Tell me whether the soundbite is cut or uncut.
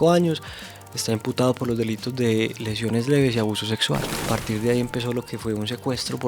cut